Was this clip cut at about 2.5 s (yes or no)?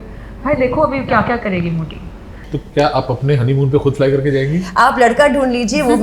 yes